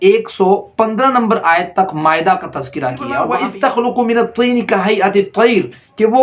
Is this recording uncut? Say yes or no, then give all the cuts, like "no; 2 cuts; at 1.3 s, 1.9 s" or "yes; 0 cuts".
no; 1 cut; at 3.3 s